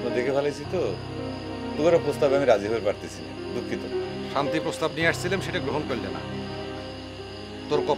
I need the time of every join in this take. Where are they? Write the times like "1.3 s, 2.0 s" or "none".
none